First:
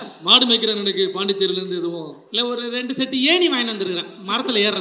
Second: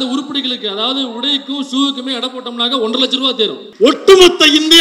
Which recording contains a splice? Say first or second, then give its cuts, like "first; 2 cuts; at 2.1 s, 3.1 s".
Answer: second; 1 cut; at 3.7 s